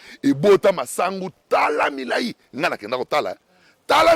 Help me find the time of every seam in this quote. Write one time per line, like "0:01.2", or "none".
none

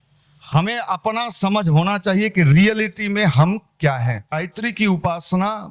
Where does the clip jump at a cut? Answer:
0:04.5

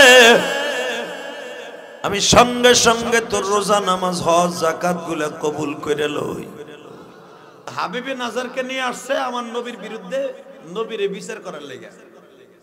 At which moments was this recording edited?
0:07.7

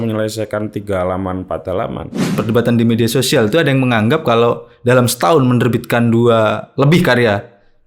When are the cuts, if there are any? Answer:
0:02.4

